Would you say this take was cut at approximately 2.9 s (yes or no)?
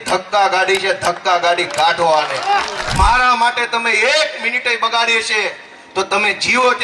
yes